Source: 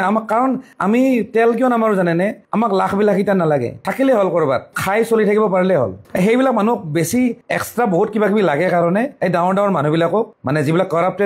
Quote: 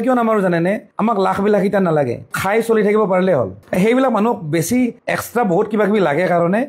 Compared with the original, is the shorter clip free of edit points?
no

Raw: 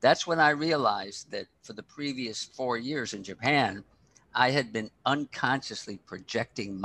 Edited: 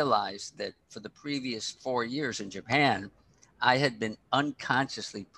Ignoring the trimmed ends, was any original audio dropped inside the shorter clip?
no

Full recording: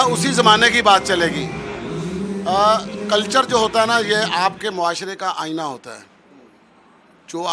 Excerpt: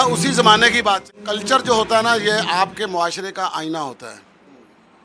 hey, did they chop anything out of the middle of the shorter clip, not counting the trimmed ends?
yes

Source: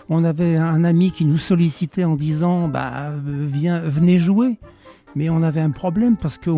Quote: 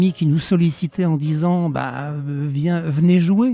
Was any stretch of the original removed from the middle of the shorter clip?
no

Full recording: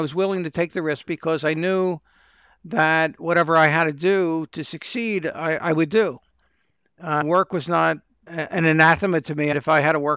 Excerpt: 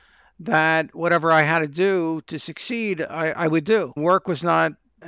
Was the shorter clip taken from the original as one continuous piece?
no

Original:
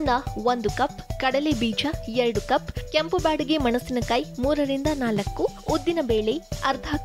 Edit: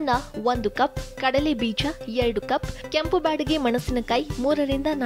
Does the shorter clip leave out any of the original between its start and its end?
no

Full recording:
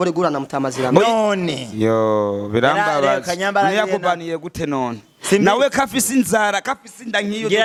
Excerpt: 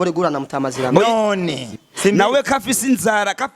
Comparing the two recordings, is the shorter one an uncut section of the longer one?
no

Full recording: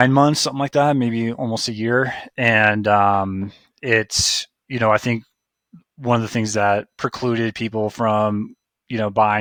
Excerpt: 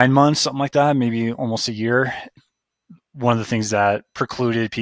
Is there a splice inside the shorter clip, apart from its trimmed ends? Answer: yes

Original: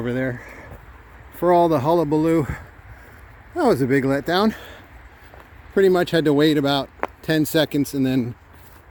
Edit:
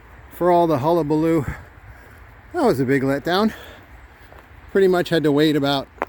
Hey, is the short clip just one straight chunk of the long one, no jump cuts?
yes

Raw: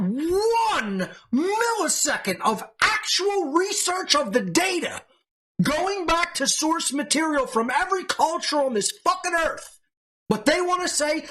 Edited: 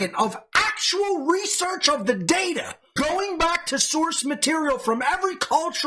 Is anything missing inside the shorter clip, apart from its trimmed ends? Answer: yes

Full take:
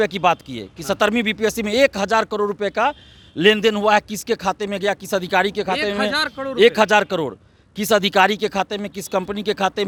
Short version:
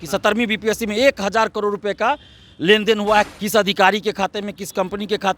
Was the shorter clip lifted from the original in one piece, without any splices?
no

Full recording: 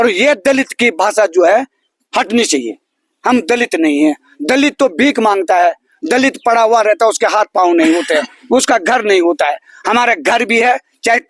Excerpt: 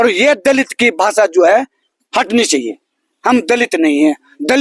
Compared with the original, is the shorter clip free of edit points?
yes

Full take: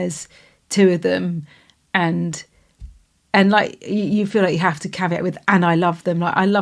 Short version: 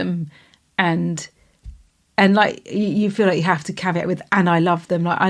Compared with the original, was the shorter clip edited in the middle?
no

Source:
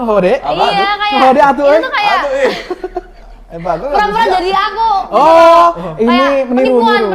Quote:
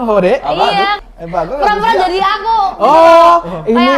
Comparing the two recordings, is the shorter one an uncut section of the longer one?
no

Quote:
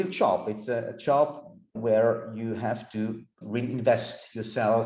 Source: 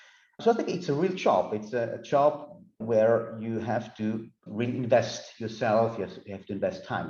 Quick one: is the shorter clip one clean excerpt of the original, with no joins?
yes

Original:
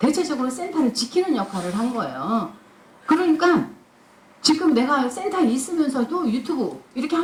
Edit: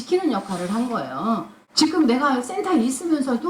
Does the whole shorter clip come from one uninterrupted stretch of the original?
no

